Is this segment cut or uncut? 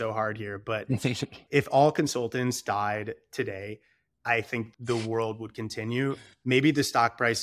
cut